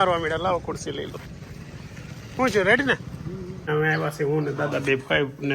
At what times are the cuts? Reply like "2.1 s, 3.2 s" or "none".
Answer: 3.7 s